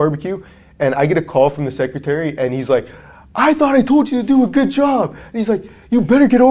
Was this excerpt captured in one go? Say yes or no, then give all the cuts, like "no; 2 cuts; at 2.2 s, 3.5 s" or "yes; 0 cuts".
yes; 0 cuts